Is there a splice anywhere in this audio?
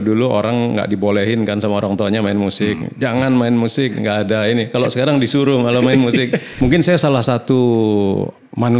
yes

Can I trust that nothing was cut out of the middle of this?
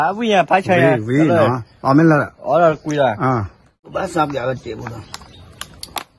no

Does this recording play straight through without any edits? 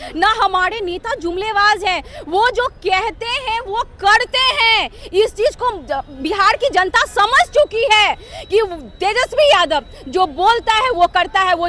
yes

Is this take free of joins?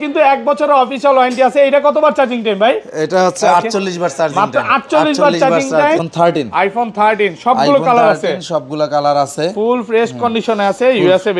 no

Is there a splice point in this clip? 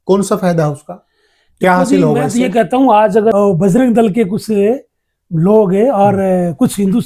yes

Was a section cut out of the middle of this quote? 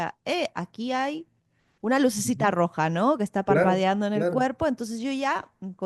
no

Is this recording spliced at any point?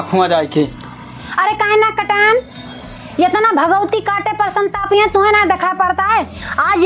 no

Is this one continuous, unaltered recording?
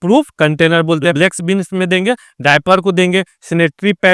no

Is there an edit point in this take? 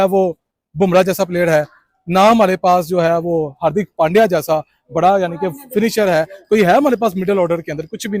no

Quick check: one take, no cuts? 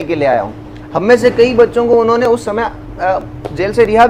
yes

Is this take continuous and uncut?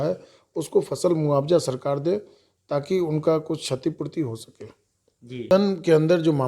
no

